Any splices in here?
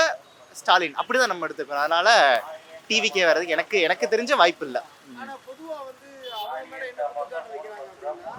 no; 0 cuts

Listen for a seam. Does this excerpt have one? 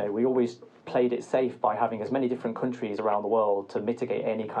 no; 0 cuts

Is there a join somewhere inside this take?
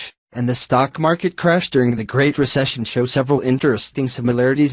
no; 0 cuts

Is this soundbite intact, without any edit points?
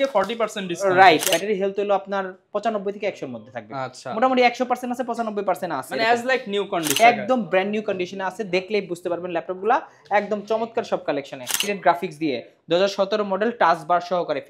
no; 3 cuts; at 1.3 s, 7.0 s, 11.6 s

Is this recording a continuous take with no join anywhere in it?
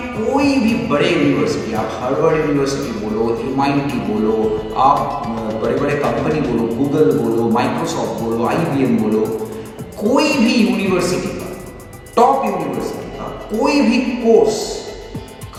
yes; 0 cuts

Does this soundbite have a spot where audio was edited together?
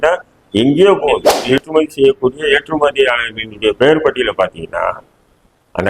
yes; 1 cut; at 1.6 s

